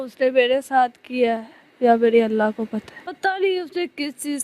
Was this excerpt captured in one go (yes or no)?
no